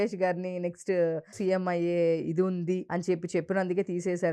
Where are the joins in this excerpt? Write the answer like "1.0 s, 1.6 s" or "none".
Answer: 1.3 s, 2.9 s